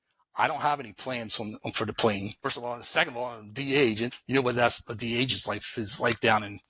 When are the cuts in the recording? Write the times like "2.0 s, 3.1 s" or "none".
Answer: 2.5 s, 4.1 s